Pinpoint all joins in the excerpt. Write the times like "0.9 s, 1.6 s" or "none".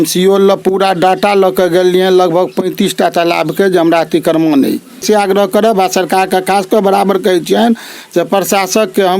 5.0 s